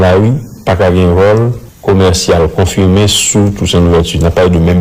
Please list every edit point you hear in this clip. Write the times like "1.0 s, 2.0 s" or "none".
1.6 s